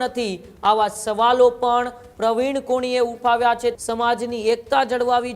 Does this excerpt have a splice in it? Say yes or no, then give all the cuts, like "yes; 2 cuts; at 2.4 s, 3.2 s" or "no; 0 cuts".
yes; 1 cut; at 3.8 s